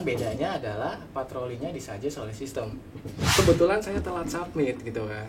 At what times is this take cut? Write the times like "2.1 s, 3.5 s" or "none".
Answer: 3.3 s